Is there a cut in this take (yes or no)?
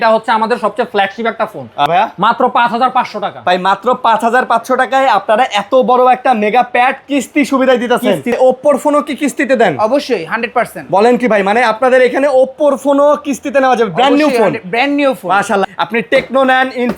yes